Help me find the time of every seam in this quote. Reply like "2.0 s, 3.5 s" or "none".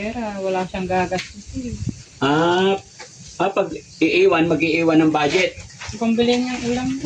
none

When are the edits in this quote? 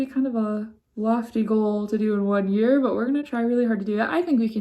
none

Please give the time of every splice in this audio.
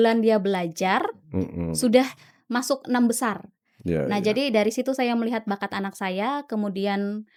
none

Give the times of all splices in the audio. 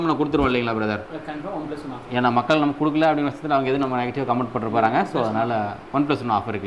none

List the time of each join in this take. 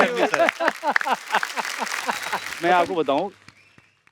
2.5 s

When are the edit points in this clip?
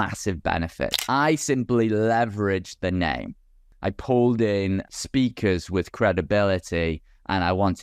1.0 s, 3.6 s, 4.9 s

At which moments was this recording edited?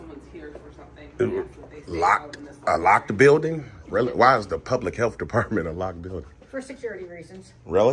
none

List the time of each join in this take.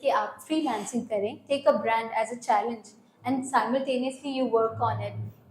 none

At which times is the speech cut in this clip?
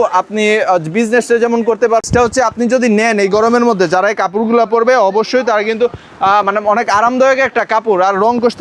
none

